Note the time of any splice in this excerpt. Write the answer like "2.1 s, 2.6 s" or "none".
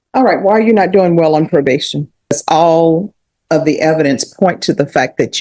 2.3 s